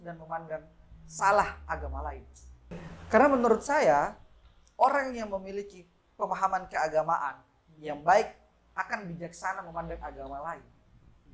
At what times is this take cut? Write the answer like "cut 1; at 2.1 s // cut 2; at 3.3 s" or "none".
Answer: cut 1; at 2.7 s